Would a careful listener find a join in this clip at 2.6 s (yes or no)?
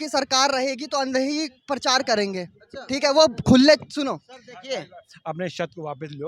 no